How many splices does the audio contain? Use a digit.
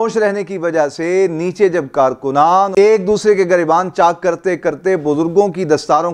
1